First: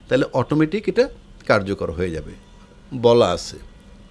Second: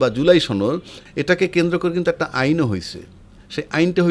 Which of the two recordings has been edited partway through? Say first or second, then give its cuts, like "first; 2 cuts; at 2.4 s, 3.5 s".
second; 1 cut; at 0.9 s